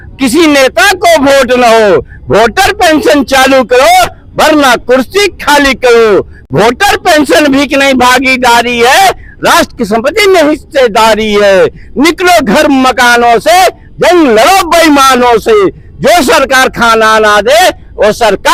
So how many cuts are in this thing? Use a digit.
0